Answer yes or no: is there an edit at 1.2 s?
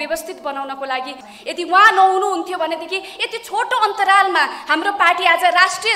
yes